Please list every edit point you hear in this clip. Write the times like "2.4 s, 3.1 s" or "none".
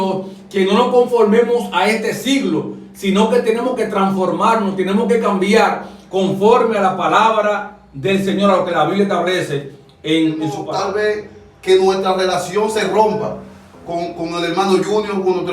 10.7 s